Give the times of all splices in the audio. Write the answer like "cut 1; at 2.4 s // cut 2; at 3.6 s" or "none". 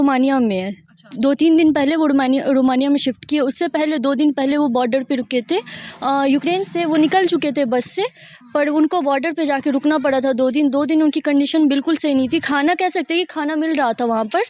none